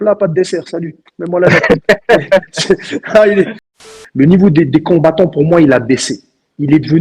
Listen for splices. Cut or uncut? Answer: cut